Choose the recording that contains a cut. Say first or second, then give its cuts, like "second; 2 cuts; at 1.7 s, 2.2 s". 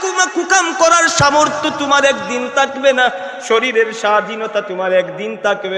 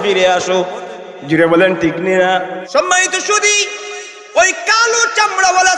second; 1 cut; at 2.6 s